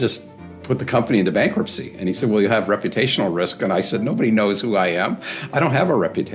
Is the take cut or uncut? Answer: uncut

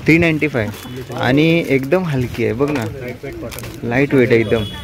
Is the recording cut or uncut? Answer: uncut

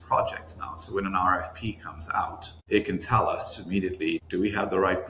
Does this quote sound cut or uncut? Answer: cut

